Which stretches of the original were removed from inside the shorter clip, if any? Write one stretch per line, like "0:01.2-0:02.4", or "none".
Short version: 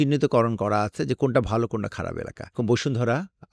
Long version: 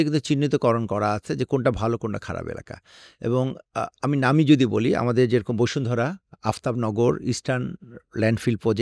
0:02.8-0:05.4